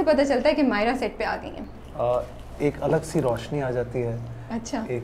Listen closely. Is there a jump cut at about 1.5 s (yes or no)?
no